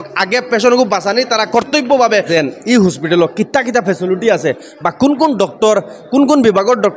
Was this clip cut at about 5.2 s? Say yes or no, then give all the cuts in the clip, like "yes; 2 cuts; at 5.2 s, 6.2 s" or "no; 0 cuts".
no; 1 cut; at 2.3 s